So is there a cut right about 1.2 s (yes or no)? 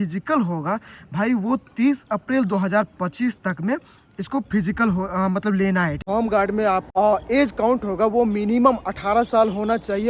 no